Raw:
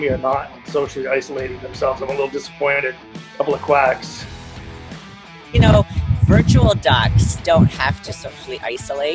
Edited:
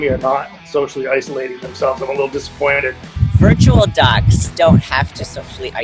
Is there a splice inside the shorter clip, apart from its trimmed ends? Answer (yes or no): yes